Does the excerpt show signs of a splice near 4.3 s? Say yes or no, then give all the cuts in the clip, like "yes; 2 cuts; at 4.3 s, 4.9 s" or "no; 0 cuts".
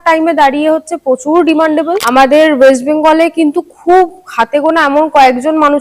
no; 1 cut; at 2.0 s